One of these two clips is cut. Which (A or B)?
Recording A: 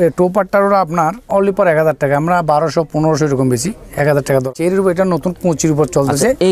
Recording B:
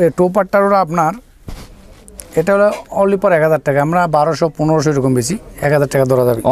A